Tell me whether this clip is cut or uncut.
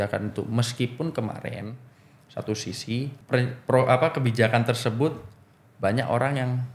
cut